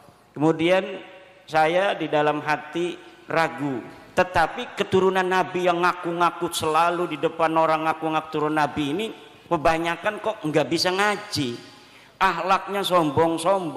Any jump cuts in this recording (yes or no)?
yes